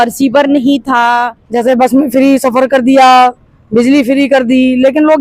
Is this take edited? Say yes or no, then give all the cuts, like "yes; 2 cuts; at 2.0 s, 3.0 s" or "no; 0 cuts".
yes; 1 cut; at 1.4 s